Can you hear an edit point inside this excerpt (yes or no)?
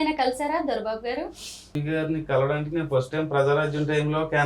yes